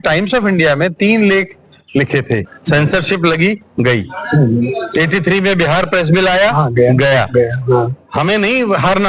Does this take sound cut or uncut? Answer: cut